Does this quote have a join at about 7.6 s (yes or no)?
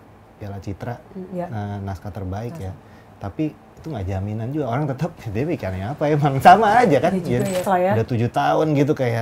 yes